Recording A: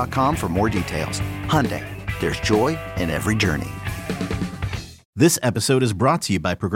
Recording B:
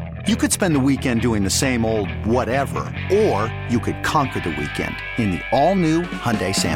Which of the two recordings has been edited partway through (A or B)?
A